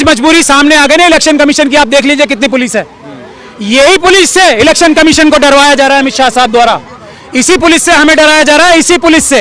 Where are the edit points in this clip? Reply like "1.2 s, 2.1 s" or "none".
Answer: none